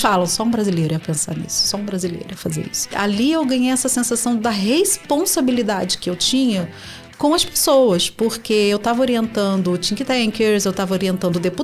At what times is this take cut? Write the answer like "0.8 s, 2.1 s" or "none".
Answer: 2.9 s

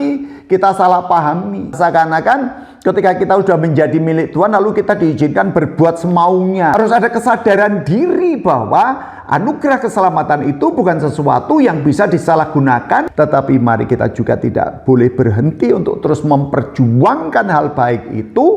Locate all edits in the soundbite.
1.8 s, 6.7 s, 13.1 s

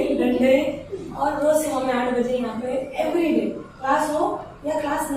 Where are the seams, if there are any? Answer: none

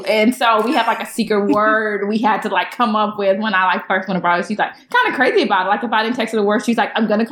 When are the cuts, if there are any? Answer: 4.8 s

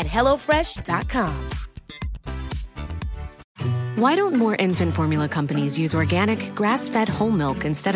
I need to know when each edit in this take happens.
3.4 s

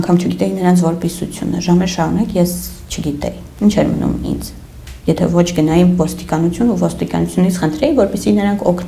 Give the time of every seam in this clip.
none

